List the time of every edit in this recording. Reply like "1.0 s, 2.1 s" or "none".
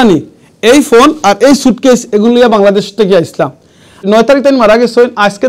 4.0 s